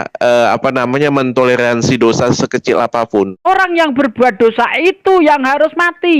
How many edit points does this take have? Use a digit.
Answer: 1